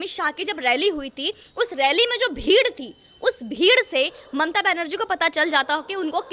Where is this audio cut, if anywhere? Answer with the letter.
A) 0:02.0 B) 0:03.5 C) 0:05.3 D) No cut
D